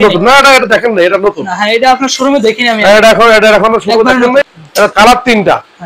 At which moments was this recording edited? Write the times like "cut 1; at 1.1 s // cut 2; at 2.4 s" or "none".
cut 1; at 4.4 s